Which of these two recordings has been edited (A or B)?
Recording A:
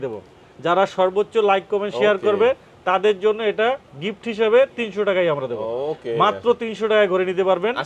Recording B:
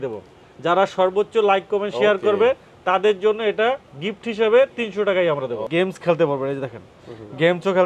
B